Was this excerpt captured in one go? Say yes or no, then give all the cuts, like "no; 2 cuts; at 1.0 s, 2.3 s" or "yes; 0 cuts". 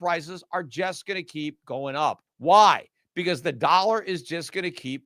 no; 1 cut; at 2.3 s